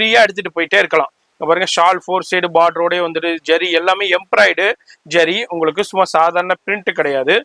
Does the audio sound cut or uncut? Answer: uncut